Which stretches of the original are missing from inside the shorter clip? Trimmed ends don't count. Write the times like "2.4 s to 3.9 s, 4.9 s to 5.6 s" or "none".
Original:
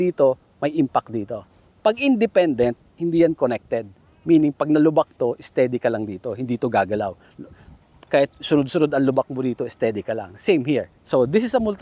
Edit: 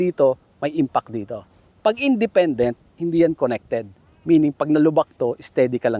none